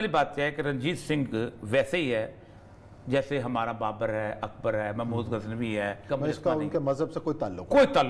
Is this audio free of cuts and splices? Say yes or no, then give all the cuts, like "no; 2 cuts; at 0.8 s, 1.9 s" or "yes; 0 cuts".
no; 1 cut; at 6.0 s